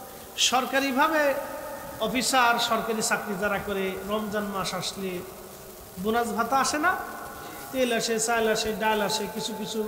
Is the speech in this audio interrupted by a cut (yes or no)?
no